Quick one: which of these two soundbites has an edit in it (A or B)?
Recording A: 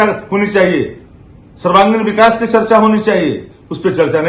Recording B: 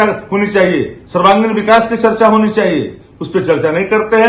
B